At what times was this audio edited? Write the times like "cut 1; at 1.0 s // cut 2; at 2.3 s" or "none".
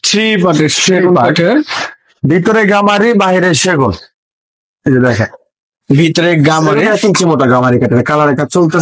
none

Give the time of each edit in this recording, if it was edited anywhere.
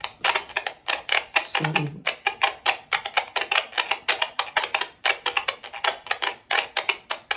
none

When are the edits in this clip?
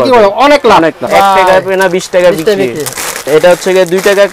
cut 1; at 1.1 s // cut 2; at 3.2 s

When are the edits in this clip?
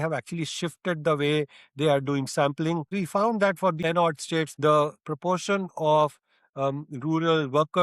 cut 1; at 2.9 s // cut 2; at 4.0 s

